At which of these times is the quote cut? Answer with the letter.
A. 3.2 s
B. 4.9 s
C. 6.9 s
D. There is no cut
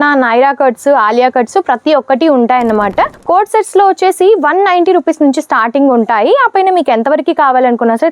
A